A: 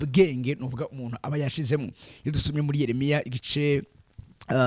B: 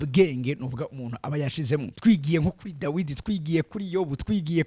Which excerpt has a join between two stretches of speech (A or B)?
B